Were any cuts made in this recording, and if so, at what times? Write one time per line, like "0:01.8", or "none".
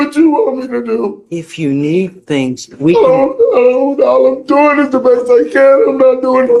none